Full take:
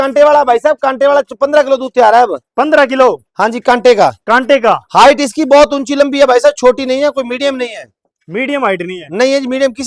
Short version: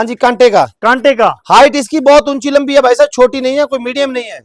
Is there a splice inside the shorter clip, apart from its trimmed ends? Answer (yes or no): no